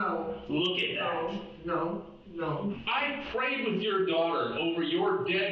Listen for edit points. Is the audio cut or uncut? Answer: cut